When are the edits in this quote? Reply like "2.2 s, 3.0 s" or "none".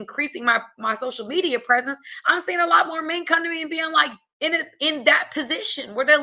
4.2 s